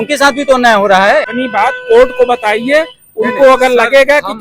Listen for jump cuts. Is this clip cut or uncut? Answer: cut